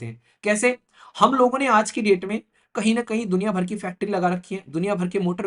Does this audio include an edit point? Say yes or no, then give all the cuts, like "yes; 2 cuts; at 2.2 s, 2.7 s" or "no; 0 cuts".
no; 0 cuts